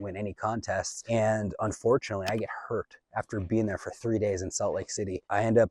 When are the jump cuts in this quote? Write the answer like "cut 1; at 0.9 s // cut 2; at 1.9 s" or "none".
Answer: cut 1; at 1.0 s